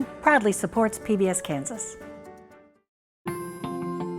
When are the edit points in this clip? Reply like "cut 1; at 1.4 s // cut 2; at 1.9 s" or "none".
cut 1; at 3.0 s